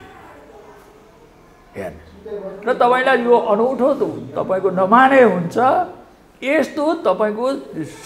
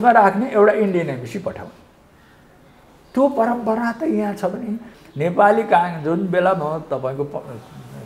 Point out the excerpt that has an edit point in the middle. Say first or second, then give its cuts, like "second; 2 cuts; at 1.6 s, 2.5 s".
second; 1 cut; at 4.9 s